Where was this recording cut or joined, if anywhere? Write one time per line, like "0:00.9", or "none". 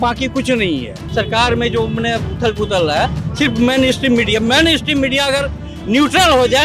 0:01.1